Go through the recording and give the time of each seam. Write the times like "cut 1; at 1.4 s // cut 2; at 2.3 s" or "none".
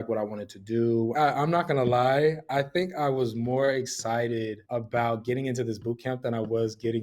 cut 1; at 1.1 s // cut 2; at 4.6 s